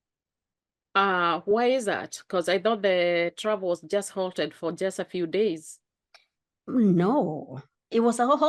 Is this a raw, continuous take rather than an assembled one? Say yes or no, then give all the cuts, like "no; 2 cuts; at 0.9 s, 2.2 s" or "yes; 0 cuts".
yes; 0 cuts